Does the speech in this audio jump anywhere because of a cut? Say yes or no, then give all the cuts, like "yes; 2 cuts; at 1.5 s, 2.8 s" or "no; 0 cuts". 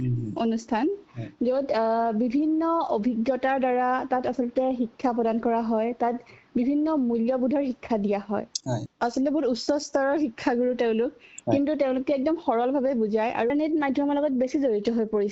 yes; 2 cuts; at 8.8 s, 13.5 s